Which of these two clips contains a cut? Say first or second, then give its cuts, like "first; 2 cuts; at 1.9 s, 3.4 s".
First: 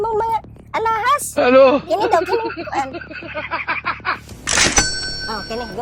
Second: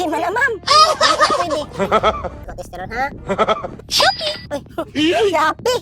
second; 1 cut; at 2.4 s